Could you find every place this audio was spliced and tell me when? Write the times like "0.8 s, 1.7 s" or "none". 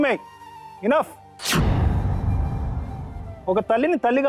1.3 s, 3.3 s